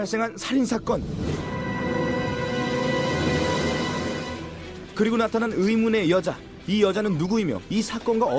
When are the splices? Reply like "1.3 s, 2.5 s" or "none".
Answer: none